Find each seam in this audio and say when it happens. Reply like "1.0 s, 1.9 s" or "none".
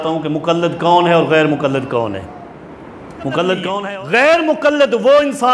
3.8 s